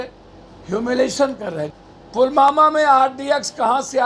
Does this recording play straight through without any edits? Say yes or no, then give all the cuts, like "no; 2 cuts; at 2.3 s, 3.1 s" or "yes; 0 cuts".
no; 1 cut; at 1.8 s